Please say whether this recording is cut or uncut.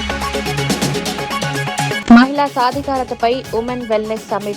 cut